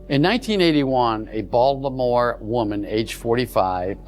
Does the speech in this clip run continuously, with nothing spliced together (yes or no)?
yes